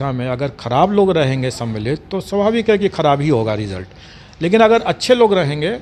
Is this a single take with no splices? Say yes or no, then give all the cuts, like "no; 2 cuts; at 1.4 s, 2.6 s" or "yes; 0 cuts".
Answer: yes; 0 cuts